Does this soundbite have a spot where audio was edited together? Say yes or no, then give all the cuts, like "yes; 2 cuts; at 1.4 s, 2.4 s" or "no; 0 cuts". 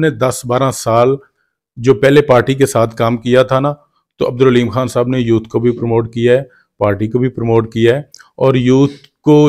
no; 0 cuts